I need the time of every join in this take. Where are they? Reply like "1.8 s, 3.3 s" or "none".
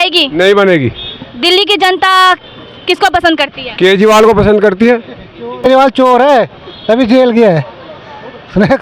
5.6 s